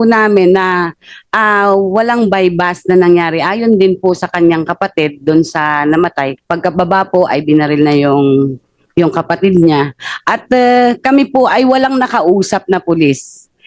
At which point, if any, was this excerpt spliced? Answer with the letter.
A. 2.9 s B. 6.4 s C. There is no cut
B